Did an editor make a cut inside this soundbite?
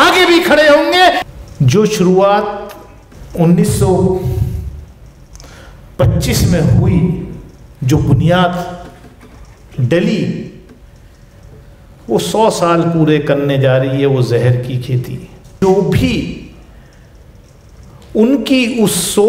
yes; 2 cuts; at 1.2 s, 15.5 s

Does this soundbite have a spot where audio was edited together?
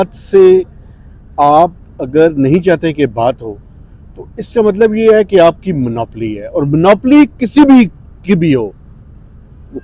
no; 0 cuts

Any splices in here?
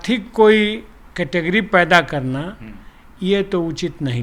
no; 0 cuts

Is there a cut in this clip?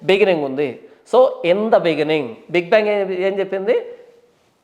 no; 0 cuts

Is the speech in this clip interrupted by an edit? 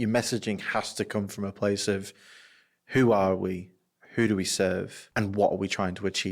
yes; 1 cut; at 5.0 s

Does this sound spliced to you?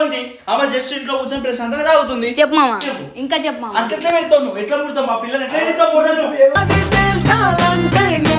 no; 0 cuts

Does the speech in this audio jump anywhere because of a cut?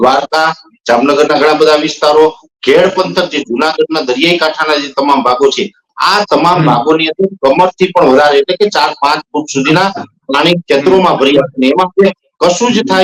no; 0 cuts

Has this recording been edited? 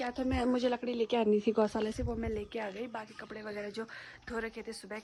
no; 0 cuts

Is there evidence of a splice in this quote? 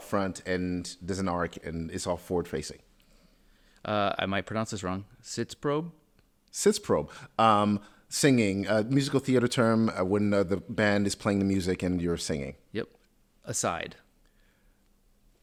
no; 0 cuts

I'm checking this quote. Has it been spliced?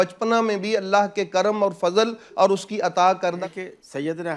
yes; 1 cut; at 3.5 s

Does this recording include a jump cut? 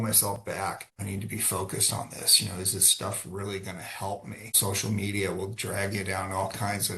yes; 2 cuts; at 0.9 s, 4.5 s

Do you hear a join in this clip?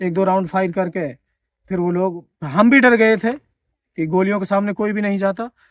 no; 0 cuts

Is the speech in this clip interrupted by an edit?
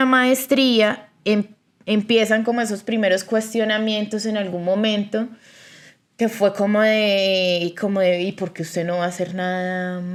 no; 0 cuts

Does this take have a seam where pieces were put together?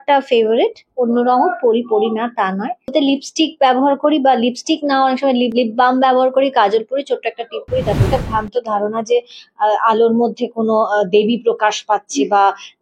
yes; 3 cuts; at 2.9 s, 5.5 s, 8.1 s

